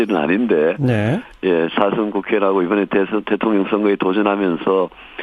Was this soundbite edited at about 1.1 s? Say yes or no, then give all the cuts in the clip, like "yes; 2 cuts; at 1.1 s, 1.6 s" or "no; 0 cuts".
yes; 1 cut; at 1.1 s